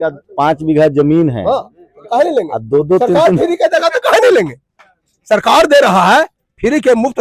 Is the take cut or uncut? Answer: uncut